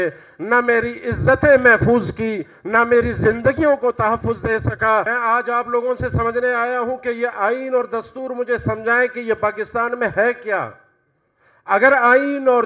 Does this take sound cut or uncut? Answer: cut